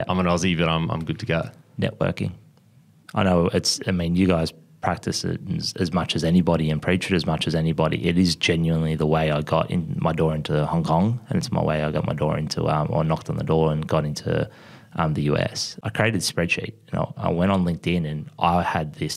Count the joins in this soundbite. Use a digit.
1